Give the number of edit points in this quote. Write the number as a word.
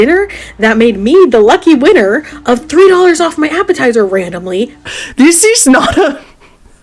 one